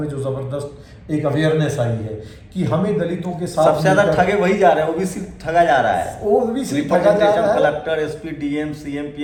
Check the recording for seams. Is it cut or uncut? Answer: uncut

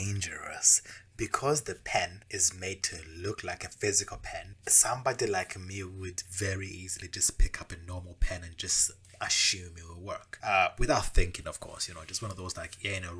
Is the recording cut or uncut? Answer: cut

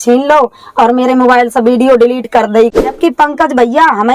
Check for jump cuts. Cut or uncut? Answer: cut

